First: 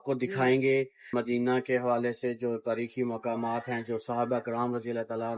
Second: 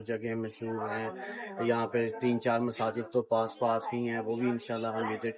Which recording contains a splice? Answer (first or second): first